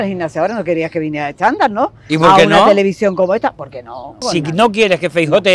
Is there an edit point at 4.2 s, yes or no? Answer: yes